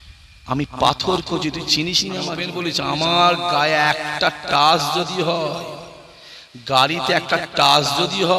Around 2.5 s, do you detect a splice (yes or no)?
yes